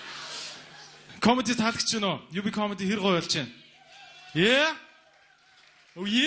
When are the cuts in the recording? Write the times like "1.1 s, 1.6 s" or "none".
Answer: none